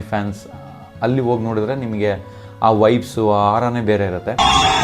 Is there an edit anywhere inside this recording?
no; 0 cuts

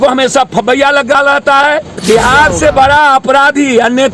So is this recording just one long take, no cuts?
no; 1 cut; at 2.0 s

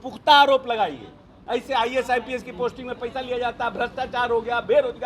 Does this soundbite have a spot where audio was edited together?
yes; 1 cut; at 1.3 s

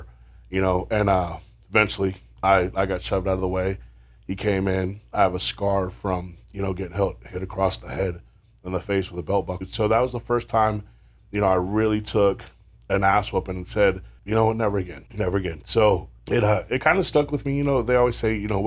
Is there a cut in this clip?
yes; 4 cuts; at 9.6 s, 14.1 s, 15.0 s, 16.1 s

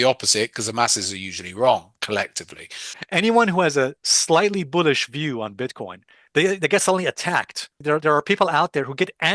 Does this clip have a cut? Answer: yes; 2 cuts; at 2.7 s, 7.7 s

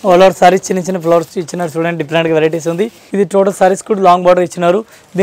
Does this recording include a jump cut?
yes; 1 cut; at 3.0 s

